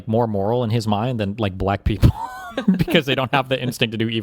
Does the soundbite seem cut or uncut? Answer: uncut